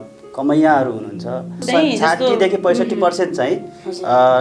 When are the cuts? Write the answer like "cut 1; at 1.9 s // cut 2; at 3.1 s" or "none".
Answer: cut 1; at 1.6 s